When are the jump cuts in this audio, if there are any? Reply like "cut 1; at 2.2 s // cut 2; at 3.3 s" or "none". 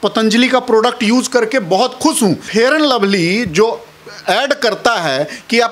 cut 1; at 2.4 s